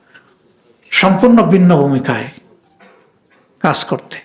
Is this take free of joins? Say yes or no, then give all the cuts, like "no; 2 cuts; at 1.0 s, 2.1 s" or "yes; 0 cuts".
yes; 0 cuts